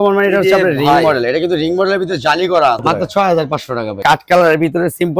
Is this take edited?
yes; 2 cuts; at 2.8 s, 4.0 s

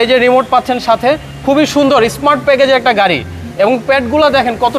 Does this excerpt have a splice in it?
no; 0 cuts

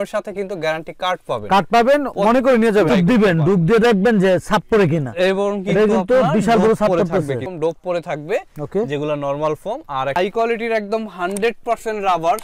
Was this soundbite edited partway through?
yes; 3 cuts; at 2.9 s, 7.5 s, 10.1 s

